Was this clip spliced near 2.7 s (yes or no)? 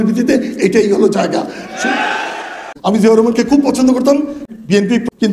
yes